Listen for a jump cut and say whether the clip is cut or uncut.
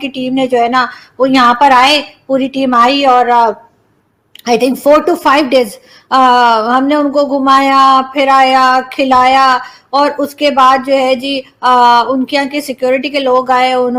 uncut